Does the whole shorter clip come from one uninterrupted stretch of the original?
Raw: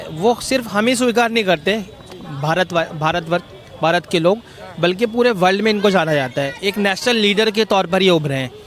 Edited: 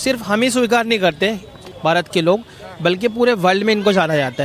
no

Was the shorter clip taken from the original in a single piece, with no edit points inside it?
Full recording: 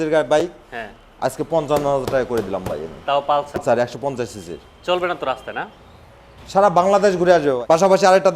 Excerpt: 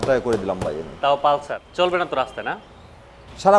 no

